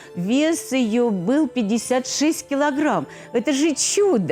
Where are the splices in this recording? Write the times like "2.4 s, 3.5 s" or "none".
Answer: none